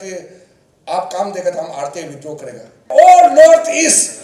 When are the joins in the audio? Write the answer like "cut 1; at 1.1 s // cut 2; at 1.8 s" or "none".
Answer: cut 1; at 2.9 s